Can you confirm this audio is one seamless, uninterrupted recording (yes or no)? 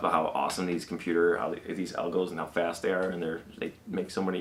yes